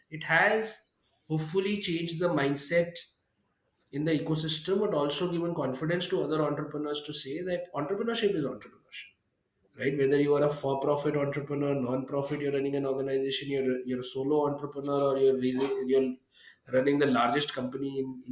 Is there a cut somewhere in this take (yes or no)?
no